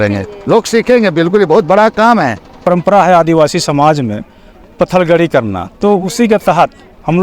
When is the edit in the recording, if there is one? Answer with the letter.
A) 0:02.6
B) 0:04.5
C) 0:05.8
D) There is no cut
A